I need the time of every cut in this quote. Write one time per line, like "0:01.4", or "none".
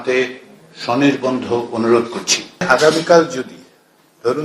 0:02.7